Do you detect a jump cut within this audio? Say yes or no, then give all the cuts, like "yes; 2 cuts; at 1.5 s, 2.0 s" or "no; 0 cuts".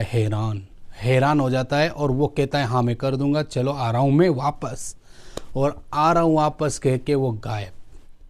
no; 0 cuts